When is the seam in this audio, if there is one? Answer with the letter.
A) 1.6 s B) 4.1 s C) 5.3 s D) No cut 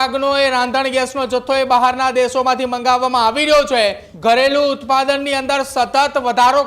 B